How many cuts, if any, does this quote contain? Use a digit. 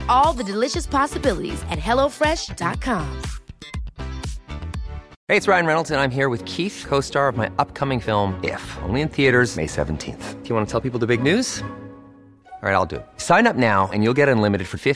1